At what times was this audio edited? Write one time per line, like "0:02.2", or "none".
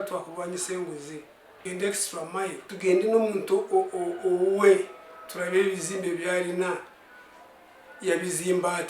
0:01.4
0:02.7